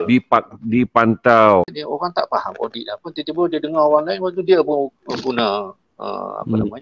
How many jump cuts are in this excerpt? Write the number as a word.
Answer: one